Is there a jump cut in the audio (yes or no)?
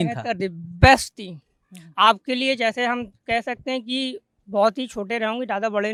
no